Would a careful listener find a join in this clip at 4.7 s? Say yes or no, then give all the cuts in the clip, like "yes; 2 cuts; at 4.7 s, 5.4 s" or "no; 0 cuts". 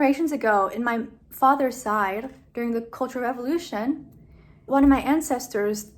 yes; 1 cut; at 4.7 s